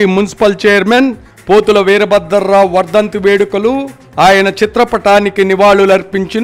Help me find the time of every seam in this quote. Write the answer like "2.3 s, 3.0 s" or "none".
none